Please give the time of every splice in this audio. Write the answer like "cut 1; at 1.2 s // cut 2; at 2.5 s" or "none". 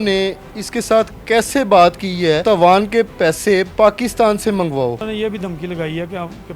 cut 1; at 2.4 s // cut 2; at 5.0 s